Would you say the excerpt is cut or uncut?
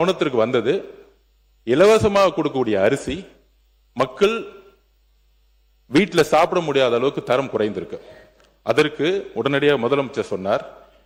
uncut